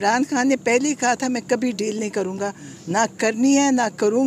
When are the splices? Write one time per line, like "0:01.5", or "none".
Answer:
none